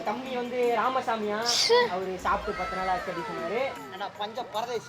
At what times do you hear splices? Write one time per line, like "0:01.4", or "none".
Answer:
0:03.9